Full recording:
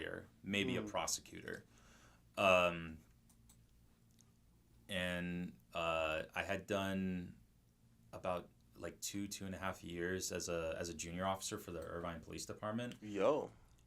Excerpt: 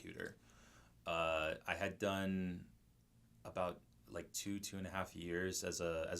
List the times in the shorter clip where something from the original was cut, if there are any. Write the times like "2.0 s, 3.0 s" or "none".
0.9 s